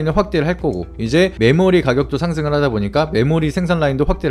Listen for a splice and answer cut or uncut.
uncut